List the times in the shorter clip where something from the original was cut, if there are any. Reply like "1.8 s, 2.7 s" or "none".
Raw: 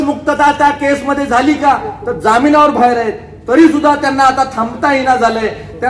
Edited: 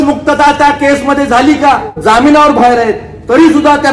1.9 s